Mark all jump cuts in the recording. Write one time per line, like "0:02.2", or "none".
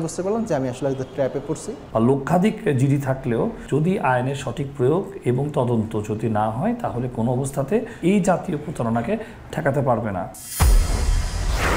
0:01.7
0:07.9
0:10.5